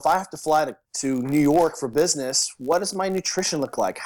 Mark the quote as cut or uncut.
uncut